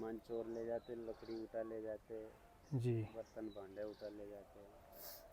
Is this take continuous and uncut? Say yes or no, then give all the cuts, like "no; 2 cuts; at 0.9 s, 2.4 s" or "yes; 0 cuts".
yes; 0 cuts